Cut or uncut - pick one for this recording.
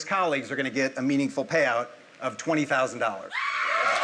uncut